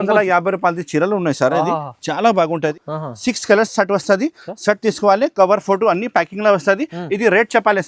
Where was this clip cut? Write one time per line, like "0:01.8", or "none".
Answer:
0:02.8